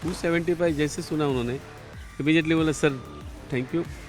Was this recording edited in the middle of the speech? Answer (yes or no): no